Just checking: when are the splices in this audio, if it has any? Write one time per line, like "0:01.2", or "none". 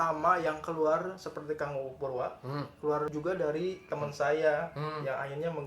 0:03.1

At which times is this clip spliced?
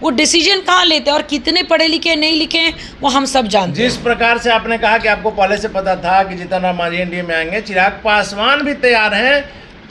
none

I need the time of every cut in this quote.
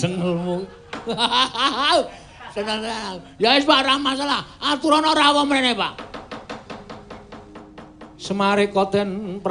none

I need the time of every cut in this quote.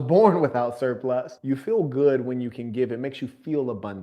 0:01.3

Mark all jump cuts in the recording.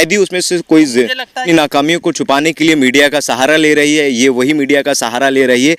0:01.4

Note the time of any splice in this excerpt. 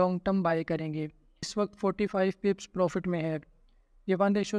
0:01.5

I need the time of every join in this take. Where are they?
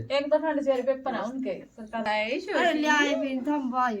0:02.0

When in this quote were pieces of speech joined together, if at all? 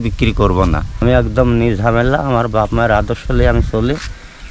0:01.0

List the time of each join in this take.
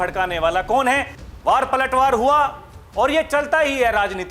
0:01.1

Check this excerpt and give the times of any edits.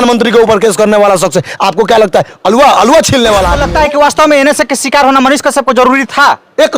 0:03.6

